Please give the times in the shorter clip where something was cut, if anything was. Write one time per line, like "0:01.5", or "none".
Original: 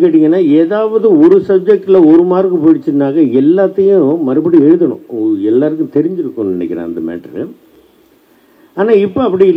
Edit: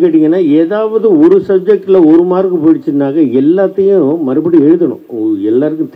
none